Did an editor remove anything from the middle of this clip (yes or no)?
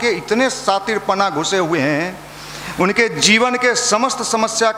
no